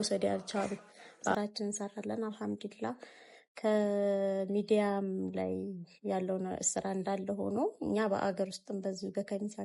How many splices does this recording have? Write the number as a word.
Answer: one